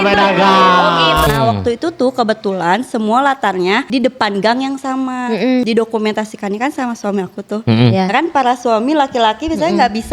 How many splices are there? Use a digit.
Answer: 3